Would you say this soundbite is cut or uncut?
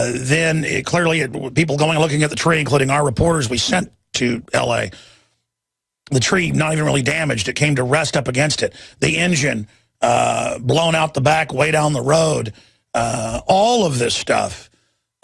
uncut